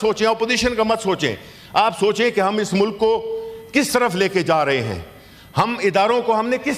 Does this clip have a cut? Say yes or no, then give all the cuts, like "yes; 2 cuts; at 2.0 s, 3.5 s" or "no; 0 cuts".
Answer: no; 0 cuts